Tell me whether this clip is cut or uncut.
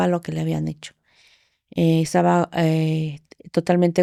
uncut